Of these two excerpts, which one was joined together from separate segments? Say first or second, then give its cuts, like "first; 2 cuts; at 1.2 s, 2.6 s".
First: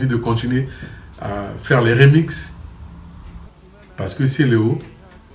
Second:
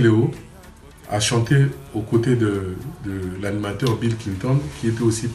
first; 1 cut; at 3.5 s